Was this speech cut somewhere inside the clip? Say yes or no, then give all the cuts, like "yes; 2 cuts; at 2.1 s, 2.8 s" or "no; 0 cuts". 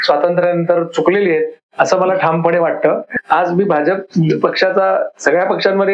yes; 1 cut; at 3.1 s